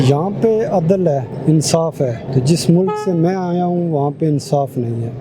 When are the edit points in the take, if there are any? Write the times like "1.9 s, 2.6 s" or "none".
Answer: 1.3 s, 2.2 s